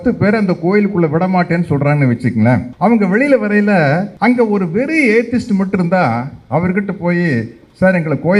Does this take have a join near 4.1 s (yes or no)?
yes